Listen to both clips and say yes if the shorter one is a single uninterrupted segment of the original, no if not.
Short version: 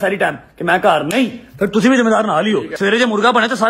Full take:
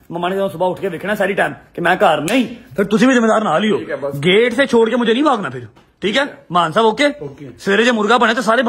no